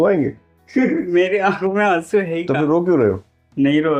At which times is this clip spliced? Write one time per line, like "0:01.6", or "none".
none